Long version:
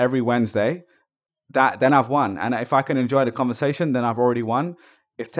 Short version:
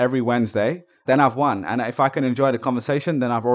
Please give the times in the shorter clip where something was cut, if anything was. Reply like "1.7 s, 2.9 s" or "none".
1.0 s

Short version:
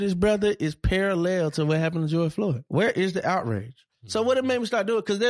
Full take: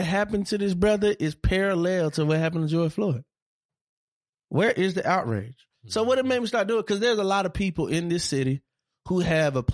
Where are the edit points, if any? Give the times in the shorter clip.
2.6 s

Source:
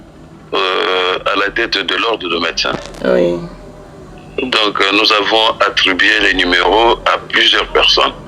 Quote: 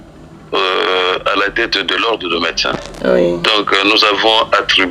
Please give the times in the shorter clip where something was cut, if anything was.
3.4 s

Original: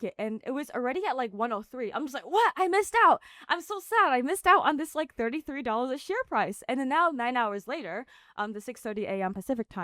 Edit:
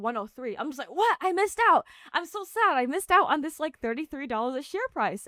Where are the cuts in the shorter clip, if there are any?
none

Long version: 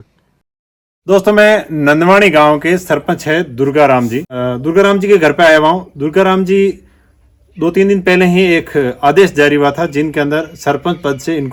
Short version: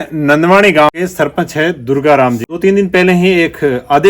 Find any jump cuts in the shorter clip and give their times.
0.9 s, 2.5 s

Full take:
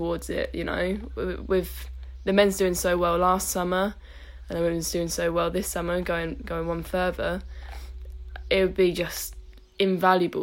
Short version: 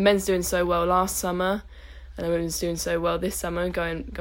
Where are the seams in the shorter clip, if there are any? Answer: none

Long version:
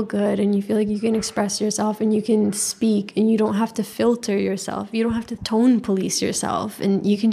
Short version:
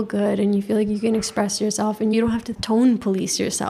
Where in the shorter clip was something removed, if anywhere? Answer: 2.1 s

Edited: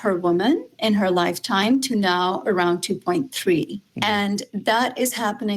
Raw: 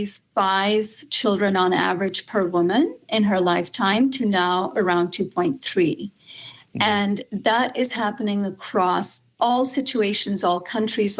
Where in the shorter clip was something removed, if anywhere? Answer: 3.8 s

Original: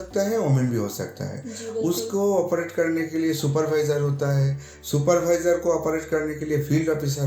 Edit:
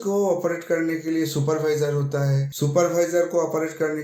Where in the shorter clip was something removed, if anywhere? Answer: 2.5 s

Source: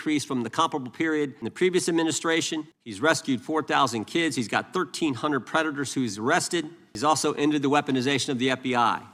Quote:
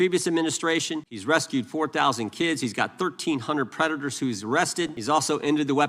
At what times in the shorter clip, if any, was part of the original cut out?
1.1 s, 5.0 s

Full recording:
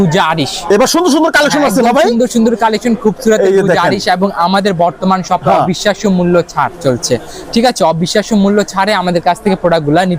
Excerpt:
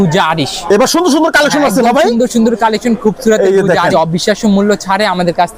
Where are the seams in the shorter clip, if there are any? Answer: 3.9 s

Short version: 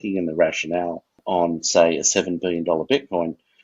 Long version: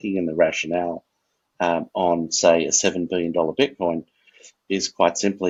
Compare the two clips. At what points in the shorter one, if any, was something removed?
1.2 s

